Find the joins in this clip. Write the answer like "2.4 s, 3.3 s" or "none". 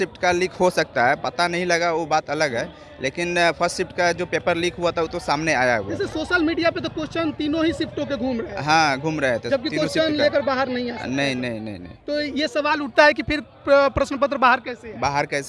none